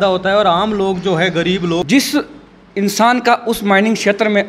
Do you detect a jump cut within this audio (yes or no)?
yes